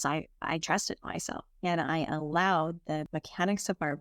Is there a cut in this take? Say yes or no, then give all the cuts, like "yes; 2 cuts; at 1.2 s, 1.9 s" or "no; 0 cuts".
yes; 2 cuts; at 1.4 s, 3.1 s